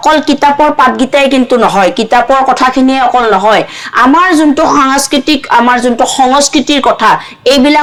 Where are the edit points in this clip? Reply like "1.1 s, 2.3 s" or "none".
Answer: none